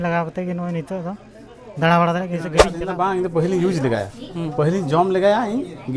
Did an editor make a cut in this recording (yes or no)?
yes